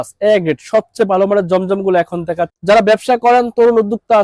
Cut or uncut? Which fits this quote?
cut